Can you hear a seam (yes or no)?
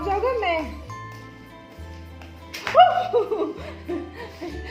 no